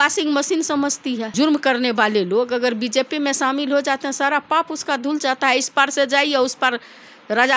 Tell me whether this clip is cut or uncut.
uncut